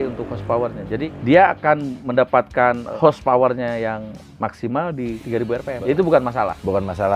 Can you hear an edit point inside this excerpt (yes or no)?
yes